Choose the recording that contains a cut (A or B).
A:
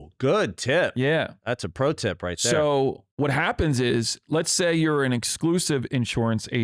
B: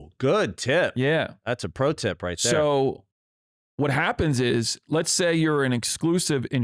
A